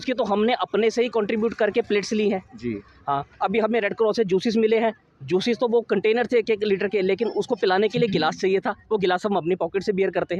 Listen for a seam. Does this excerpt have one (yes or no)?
no